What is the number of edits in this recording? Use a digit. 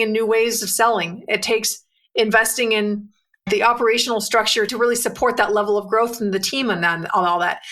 2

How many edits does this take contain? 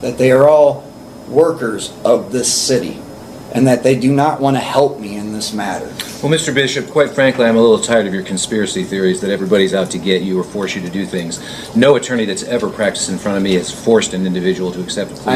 0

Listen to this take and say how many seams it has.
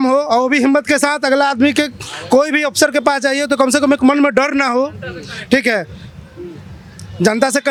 0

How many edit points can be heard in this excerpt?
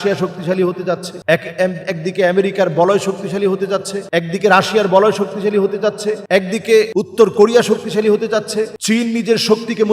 5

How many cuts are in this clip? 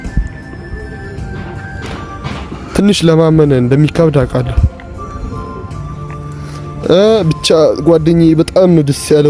0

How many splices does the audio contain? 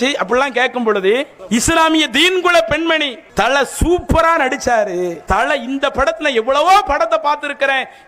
3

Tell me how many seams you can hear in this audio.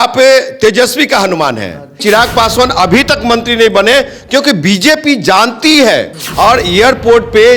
2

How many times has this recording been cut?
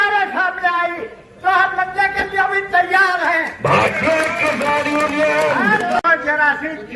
1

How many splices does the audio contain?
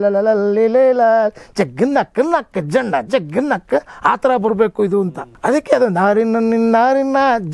1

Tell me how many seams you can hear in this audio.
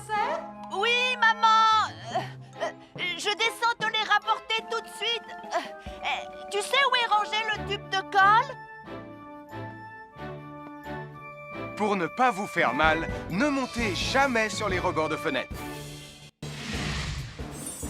1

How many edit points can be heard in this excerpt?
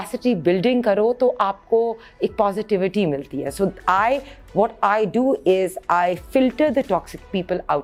0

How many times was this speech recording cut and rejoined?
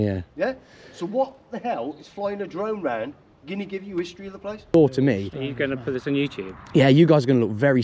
1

